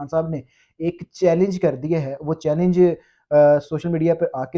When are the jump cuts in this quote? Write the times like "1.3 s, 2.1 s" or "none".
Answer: none